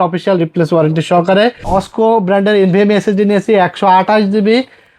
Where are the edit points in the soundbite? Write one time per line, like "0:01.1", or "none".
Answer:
0:01.6